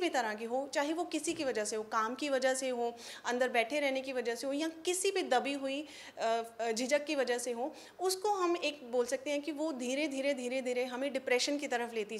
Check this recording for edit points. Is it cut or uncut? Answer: uncut